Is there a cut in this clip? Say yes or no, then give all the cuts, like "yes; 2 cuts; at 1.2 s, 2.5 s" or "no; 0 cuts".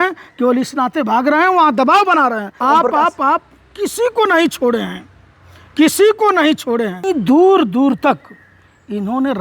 yes; 2 cuts; at 2.6 s, 7.1 s